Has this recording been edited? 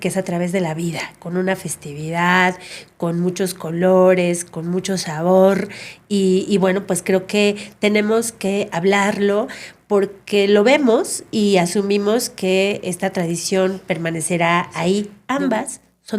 yes; 1 cut; at 15.2 s

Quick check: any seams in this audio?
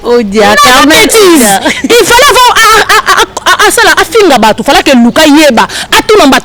no; 0 cuts

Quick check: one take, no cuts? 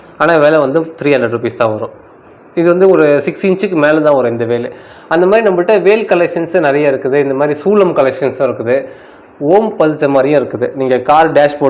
yes; 0 cuts

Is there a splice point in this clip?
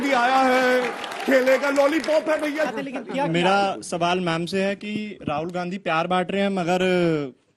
yes; 1 cut; at 2.8 s

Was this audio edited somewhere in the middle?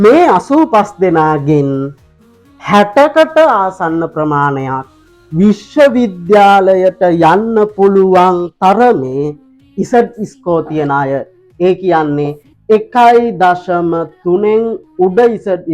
no; 0 cuts

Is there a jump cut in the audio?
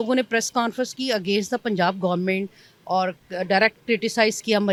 no; 0 cuts

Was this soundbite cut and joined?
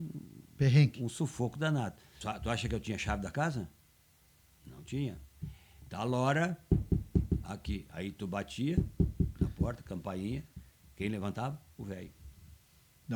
yes; 1 cut; at 2.1 s

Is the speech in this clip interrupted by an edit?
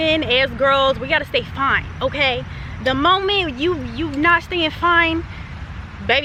no; 0 cuts

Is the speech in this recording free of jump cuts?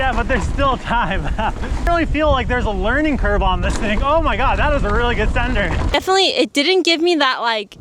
no; 2 cuts; at 1.9 s, 5.9 s

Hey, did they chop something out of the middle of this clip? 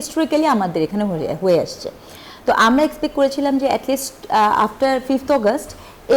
no; 0 cuts

